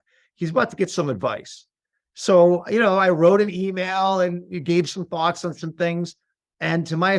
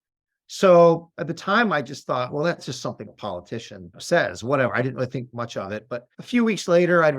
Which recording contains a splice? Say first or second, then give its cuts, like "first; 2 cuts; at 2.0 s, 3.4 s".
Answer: second; 3 cuts; at 2.6 s, 4.0 s, 6.1 s